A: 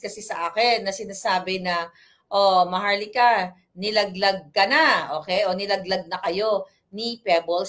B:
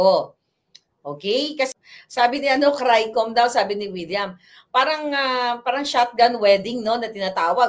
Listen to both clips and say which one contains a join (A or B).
B